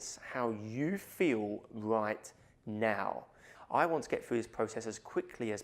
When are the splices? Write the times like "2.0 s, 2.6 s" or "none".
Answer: 3.5 s

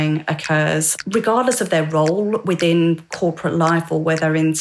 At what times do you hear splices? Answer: 0.9 s

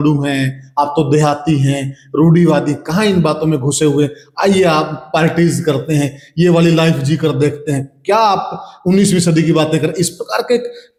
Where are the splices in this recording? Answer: none

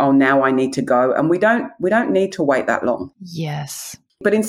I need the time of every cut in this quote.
none

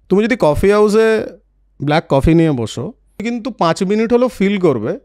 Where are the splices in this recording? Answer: 3.2 s

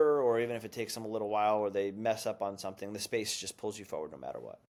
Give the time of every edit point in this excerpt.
none

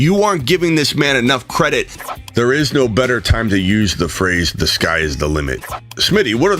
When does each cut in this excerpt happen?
2.2 s, 5.6 s

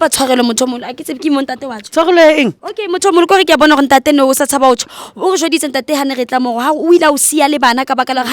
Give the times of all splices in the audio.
2.7 s

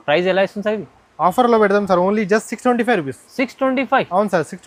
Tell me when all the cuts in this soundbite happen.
none

